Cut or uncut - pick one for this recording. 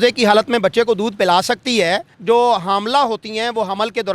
cut